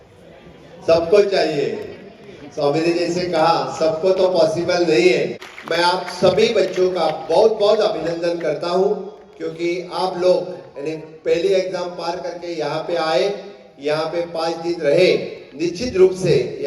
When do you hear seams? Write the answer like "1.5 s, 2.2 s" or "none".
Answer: 5.4 s